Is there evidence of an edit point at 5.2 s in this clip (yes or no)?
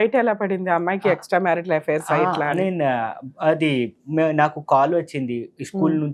no